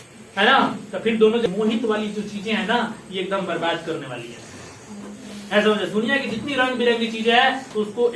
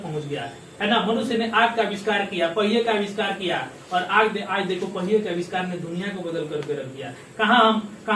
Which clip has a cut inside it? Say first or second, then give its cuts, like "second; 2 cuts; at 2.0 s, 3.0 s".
first; 1 cut; at 1.5 s